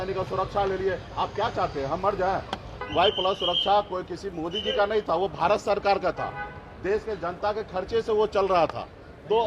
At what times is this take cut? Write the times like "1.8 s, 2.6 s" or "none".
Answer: 2.8 s